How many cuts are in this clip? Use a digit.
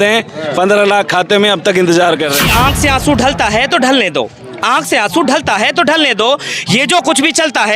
1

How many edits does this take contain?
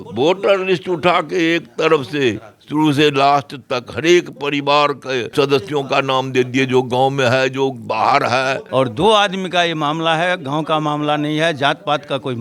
2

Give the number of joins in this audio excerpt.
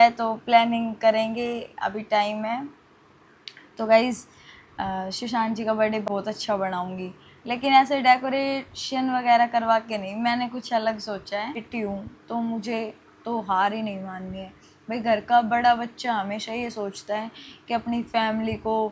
2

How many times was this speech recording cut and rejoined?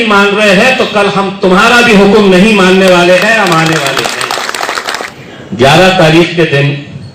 1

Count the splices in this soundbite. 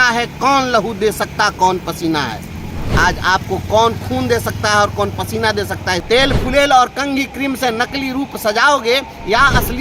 1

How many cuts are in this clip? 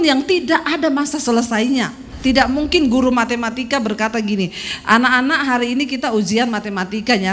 1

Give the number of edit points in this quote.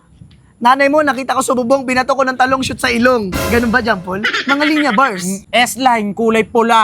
1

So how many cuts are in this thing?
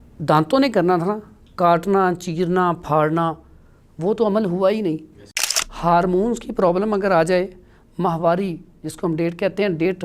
1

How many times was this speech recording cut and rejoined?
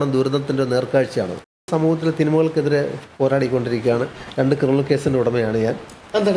1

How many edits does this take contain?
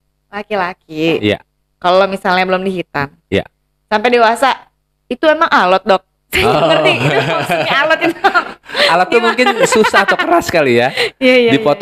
0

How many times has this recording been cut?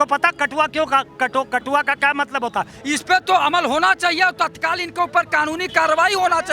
1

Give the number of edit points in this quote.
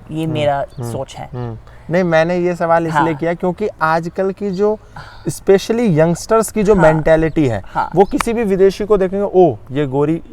0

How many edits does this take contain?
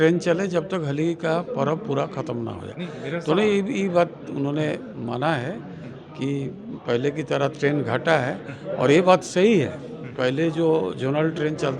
0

